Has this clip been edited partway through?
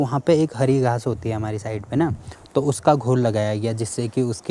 no; 0 cuts

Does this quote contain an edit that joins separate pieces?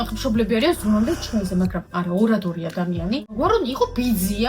yes; 1 cut; at 3.4 s

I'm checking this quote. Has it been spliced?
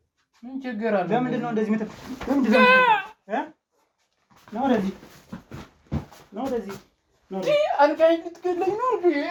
no; 0 cuts

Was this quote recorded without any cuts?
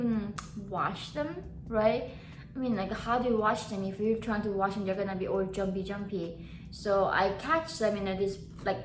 yes; 0 cuts

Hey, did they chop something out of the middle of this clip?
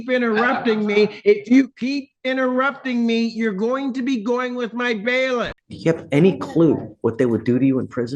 yes; 1 cut; at 5.6 s

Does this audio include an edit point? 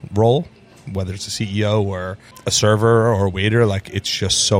yes; 1 cut; at 2.2 s

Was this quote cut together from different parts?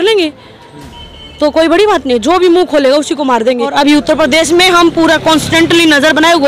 yes; 1 cut; at 3.7 s

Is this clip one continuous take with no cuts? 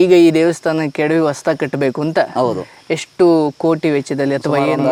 yes; 0 cuts

